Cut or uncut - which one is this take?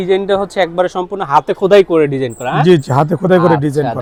uncut